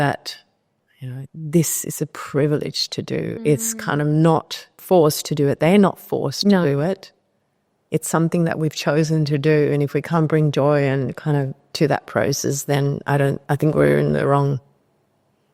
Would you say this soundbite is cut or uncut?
cut